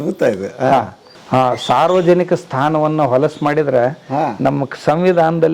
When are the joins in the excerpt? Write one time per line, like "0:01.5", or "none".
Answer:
0:01.1